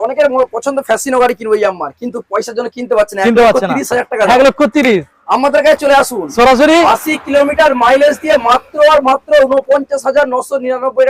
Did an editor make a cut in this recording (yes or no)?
no